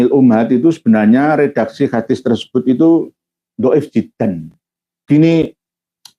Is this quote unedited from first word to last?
no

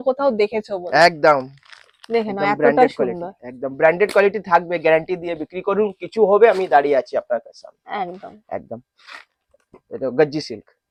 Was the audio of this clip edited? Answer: no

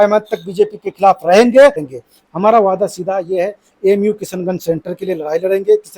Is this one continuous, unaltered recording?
no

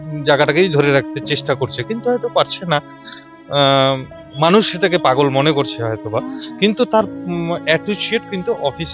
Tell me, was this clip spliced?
no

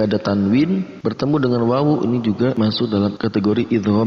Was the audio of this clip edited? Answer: yes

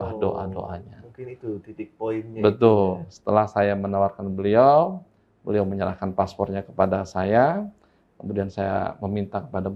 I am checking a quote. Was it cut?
no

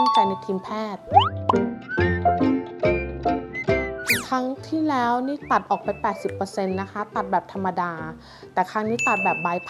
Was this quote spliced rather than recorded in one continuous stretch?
no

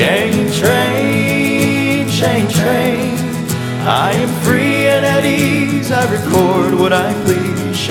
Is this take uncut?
yes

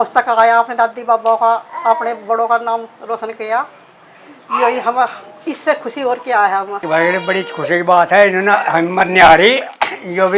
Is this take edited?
no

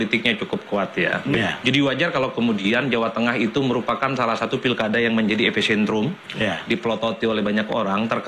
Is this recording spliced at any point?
no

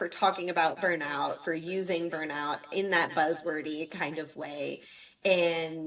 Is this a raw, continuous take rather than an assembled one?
yes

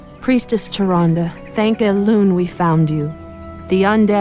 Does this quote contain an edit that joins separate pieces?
no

